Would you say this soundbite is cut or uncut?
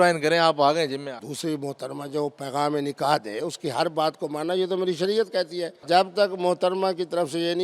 cut